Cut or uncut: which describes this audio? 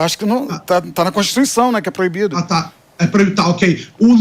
uncut